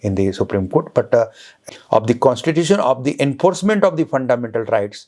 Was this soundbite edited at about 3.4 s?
no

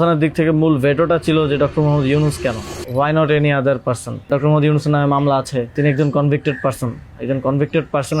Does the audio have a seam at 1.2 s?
no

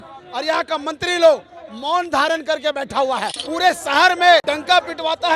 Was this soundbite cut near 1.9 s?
no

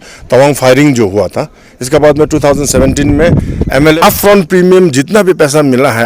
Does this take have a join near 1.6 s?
no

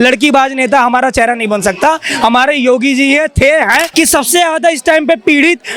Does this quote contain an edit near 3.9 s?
yes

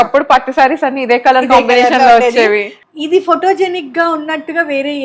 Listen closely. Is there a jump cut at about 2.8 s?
yes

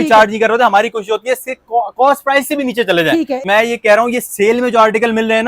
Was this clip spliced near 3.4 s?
yes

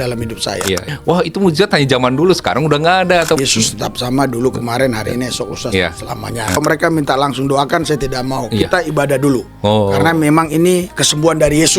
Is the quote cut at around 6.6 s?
yes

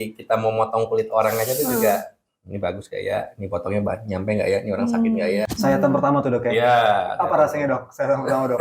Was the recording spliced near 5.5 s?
yes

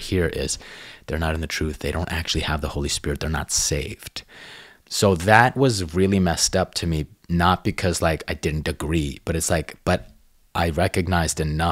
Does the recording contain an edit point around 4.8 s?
no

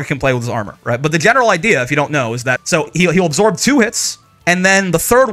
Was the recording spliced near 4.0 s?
no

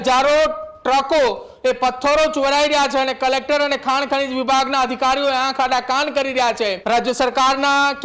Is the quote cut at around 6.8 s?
yes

